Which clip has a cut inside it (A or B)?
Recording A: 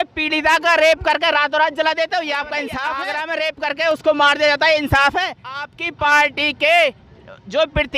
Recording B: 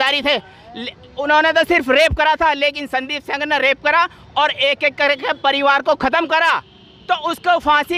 A